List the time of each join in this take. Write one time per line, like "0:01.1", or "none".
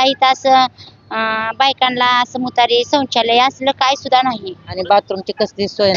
0:04.9